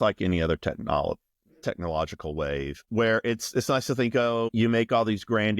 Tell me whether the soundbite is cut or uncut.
cut